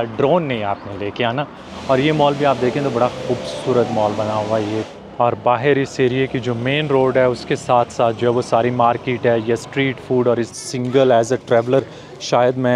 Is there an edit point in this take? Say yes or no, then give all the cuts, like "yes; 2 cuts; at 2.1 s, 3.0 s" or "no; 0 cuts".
yes; 3 cuts; at 1.7 s, 4.9 s, 10.5 s